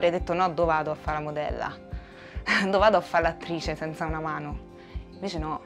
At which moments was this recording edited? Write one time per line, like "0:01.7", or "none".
none